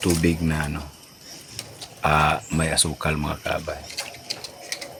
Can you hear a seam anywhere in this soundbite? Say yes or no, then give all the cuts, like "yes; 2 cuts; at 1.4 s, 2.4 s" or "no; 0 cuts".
no; 0 cuts